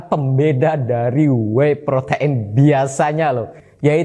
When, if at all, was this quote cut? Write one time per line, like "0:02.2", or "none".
none